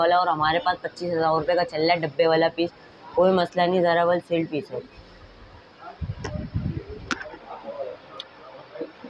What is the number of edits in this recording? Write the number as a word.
zero